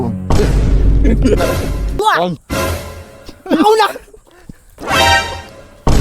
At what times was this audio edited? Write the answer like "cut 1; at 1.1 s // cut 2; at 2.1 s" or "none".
cut 1; at 2.0 s